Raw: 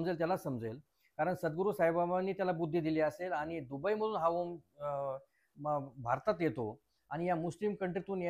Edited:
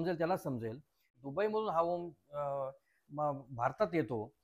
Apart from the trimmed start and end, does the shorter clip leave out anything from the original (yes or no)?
yes